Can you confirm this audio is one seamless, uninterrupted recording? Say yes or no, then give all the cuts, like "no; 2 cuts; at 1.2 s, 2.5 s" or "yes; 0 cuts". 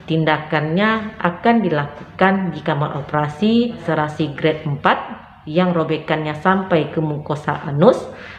no; 1 cut; at 3.8 s